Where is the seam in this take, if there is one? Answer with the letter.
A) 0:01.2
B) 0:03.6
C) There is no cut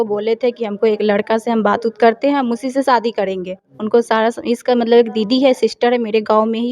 C